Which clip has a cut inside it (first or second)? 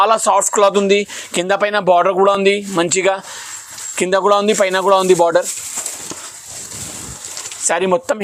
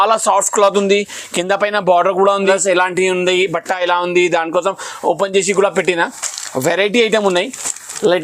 second